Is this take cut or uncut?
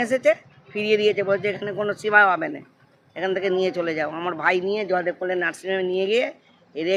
uncut